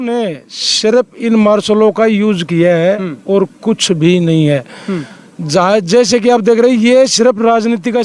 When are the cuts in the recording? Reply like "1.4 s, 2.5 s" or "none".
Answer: none